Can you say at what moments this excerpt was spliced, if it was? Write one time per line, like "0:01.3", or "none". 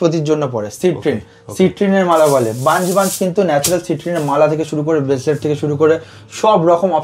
none